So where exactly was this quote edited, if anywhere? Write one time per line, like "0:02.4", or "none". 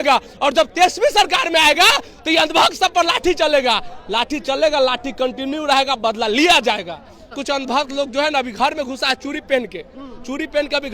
0:07.4